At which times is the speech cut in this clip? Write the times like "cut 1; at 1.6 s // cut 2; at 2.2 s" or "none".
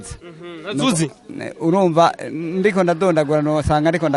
none